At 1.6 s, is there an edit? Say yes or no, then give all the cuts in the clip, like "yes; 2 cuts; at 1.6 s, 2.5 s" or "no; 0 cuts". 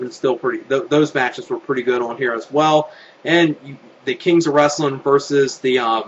no; 0 cuts